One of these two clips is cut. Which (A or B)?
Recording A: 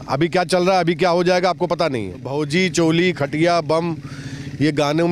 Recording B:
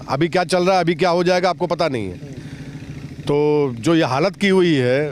A